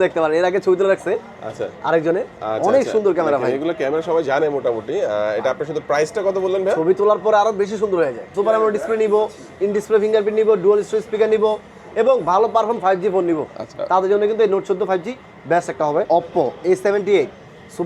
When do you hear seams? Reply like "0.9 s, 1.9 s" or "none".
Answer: 8.3 s, 16.1 s